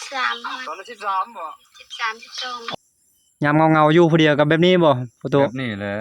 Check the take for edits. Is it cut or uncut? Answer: cut